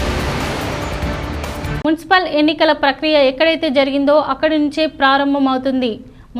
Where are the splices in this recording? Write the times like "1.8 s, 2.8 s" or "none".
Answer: none